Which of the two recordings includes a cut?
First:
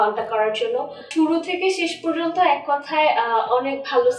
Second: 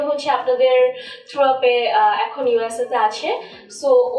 first; 1 cut; at 1.0 s

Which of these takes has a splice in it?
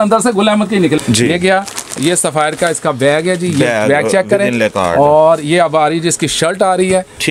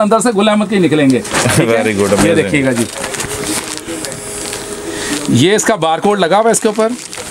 first; 1 cut; at 1.0 s

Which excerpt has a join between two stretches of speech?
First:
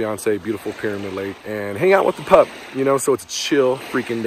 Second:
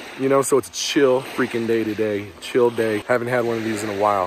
second; 1 cut; at 3.0 s

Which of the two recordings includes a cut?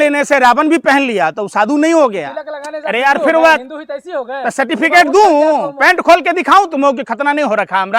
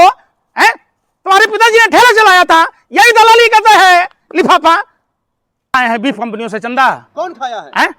second; 1 cut; at 5.7 s

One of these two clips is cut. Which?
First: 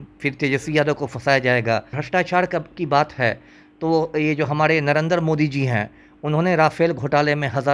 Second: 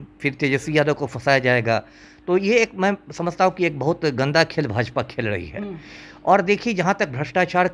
first; 1 cut; at 2.0 s

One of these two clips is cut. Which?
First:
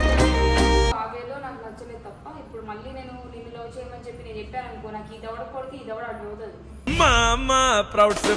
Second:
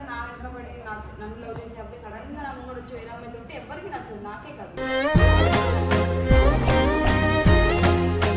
first; 1 cut; at 0.9 s

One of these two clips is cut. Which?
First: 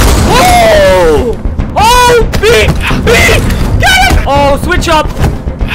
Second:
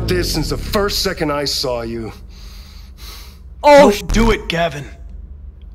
first; 2 cuts; at 1.6 s, 4.2 s

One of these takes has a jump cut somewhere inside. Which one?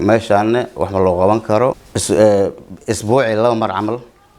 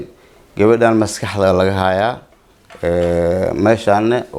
first; 1 cut; at 1.9 s

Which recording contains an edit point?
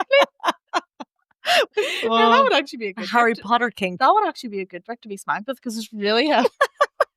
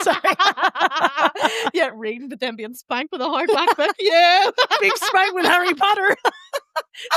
first; 1 cut; at 1.7 s

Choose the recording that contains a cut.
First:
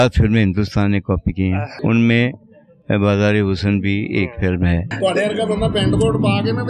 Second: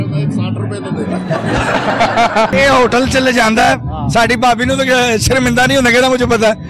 first; 2 cuts; at 1.7 s, 4.9 s

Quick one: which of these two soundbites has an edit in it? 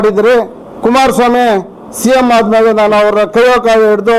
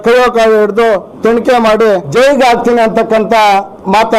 second; 1 cut; at 2.1 s

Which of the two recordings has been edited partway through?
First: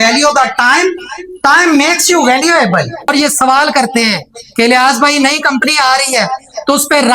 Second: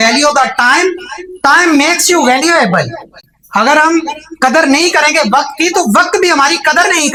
first; 1 cut; at 3.1 s

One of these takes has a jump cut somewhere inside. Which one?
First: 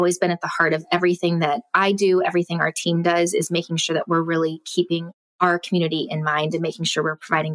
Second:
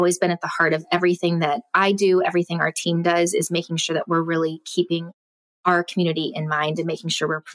first; 1 cut; at 5.2 s

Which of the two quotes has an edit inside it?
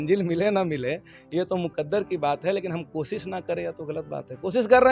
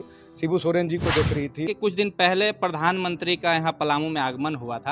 second; 1 cut; at 1.7 s

